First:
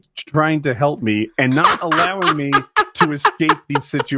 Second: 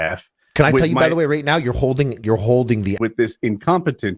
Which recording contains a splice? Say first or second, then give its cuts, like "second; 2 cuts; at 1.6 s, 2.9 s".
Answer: second; 1 cut; at 3.0 s